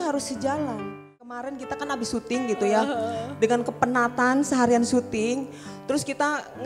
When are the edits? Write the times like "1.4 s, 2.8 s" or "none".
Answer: 1.3 s